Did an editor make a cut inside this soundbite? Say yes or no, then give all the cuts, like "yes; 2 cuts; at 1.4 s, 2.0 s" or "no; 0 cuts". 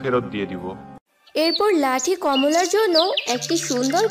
yes; 1 cut; at 1.2 s